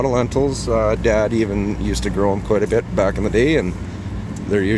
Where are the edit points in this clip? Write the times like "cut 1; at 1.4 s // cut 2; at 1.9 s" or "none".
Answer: none

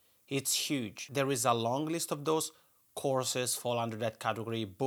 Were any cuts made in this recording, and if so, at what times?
cut 1; at 1.1 s

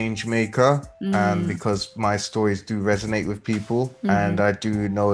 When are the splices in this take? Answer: cut 1; at 0.9 s // cut 2; at 3.9 s

